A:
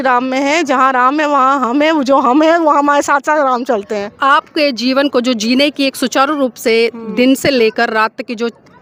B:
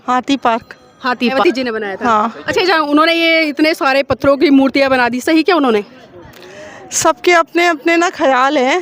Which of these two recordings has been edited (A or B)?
B